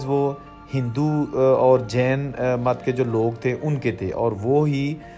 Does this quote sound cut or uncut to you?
uncut